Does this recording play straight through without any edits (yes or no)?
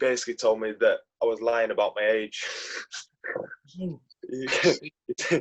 yes